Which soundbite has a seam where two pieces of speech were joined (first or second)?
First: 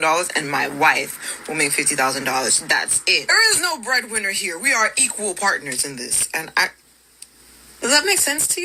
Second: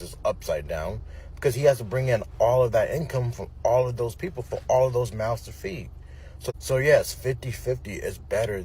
second